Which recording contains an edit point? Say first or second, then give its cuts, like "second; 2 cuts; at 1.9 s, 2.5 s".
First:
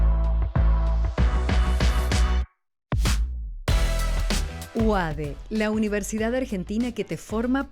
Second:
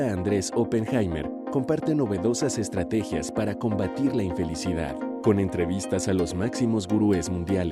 first; 1 cut; at 1.0 s